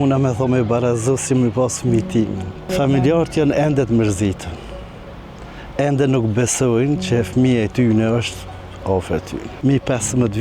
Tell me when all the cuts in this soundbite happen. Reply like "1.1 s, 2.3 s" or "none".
2.7 s, 9.5 s